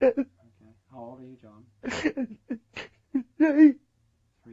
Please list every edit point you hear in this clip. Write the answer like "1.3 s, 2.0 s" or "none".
none